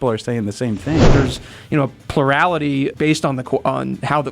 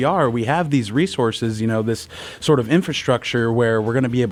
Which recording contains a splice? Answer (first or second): first